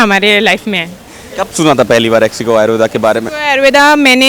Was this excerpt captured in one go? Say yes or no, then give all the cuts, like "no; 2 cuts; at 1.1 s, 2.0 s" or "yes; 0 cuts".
yes; 0 cuts